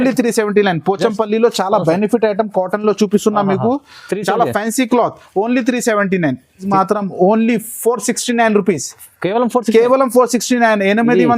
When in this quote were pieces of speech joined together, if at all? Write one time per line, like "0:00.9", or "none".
0:06.6